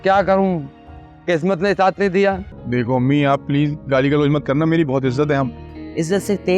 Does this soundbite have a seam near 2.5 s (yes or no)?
yes